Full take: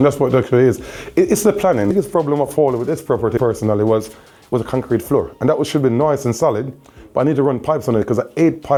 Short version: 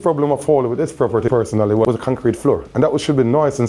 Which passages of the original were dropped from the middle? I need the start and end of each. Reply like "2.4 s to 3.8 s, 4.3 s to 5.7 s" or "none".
3.9 s to 4.5 s